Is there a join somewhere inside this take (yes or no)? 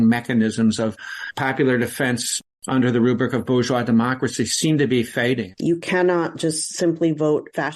yes